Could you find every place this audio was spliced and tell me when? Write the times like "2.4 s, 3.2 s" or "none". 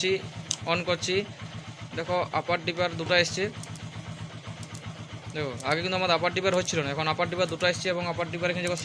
none